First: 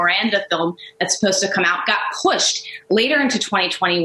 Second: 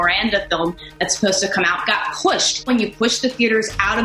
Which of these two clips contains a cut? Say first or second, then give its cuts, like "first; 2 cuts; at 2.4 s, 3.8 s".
second; 1 cut; at 2.7 s